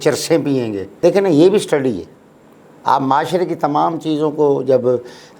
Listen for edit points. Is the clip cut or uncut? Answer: cut